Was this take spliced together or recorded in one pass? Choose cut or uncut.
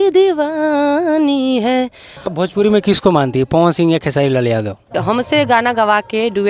cut